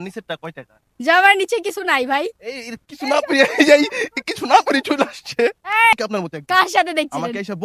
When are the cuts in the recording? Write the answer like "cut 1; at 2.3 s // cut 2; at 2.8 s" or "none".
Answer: cut 1; at 5.9 s